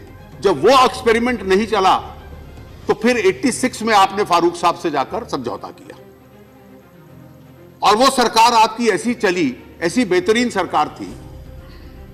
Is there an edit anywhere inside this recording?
no; 0 cuts

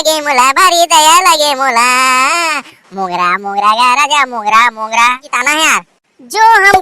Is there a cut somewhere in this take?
yes; 1 cut; at 5.3 s

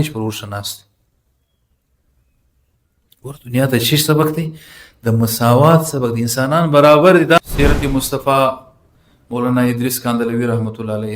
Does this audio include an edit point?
yes; 1 cut; at 7.4 s

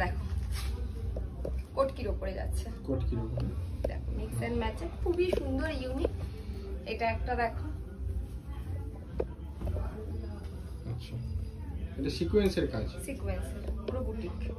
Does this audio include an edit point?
no; 0 cuts

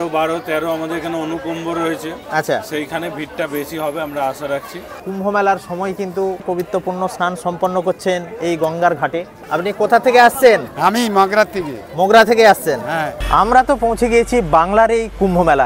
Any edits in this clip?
yes; 3 cuts; at 5.0 s, 9.3 s, 13.2 s

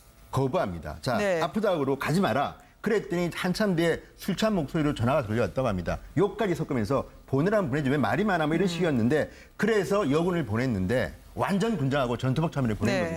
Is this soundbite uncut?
no; 1 cut; at 2.9 s

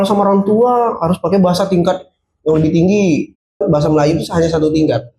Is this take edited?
yes; 1 cut; at 3.6 s

